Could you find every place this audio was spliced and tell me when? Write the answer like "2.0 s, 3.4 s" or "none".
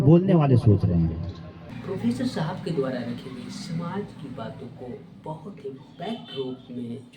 1.7 s